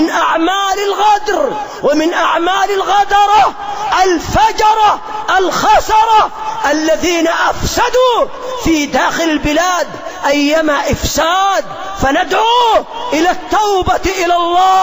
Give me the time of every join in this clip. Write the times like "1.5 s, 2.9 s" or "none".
none